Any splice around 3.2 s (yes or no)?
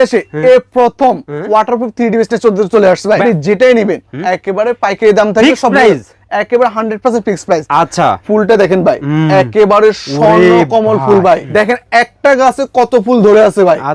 yes